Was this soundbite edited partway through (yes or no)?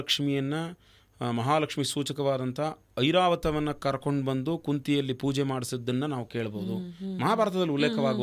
no